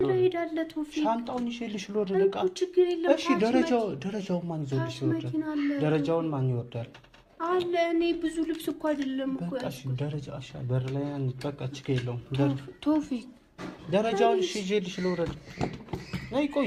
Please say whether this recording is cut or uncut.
uncut